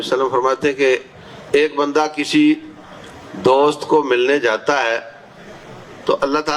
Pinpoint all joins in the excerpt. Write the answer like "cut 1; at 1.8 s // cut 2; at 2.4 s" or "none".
none